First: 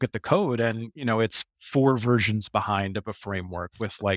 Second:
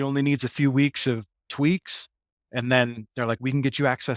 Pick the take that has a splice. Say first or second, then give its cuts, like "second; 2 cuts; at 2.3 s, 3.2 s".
second; 2 cuts; at 1.4 s, 2.4 s